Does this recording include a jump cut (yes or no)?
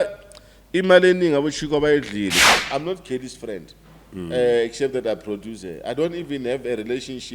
yes